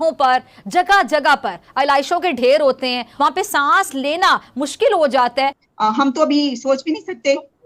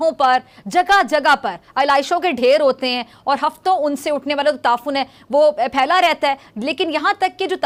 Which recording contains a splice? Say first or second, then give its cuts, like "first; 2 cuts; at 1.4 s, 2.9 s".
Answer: first; 2 cuts; at 3.1 s, 5.6 s